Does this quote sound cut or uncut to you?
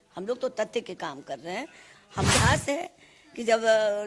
cut